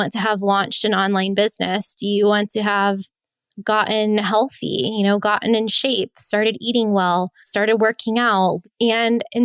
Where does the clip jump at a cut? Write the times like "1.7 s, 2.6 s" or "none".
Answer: 7.4 s, 8.6 s